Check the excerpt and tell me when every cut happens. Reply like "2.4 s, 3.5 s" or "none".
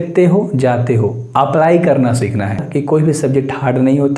2.6 s